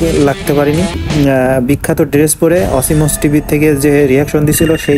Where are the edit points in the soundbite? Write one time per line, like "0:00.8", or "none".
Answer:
0:01.0